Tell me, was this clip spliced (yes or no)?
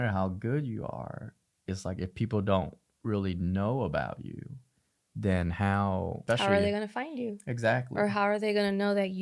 yes